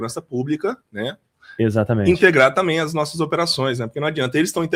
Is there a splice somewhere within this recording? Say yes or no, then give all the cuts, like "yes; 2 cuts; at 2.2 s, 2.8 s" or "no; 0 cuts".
no; 0 cuts